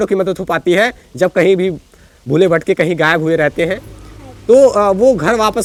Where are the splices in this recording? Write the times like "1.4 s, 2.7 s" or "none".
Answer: none